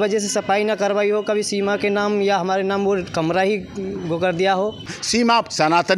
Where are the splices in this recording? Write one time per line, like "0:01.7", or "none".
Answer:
0:04.9